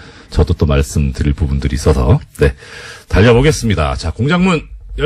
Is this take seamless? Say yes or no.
no